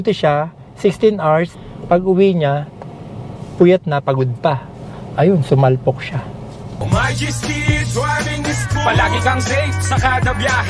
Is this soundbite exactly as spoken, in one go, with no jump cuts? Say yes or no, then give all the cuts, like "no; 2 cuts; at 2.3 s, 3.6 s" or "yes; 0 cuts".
no; 2 cuts; at 1.5 s, 6.8 s